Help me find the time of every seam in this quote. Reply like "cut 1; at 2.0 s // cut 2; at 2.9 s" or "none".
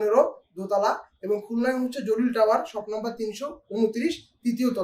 none